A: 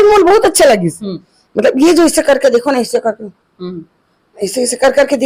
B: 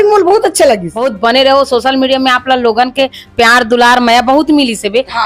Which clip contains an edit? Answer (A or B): B